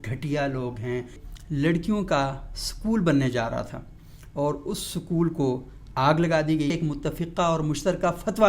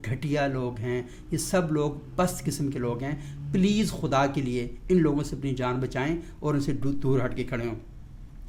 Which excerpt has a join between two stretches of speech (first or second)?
first